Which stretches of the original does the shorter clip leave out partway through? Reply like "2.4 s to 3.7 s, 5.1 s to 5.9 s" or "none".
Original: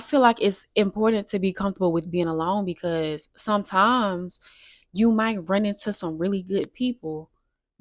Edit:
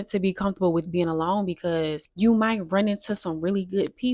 3.2 s to 4.8 s